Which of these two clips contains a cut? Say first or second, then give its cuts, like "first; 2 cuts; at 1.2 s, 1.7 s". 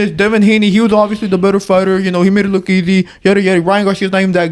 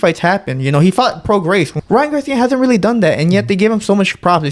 second; 1 cut; at 1.8 s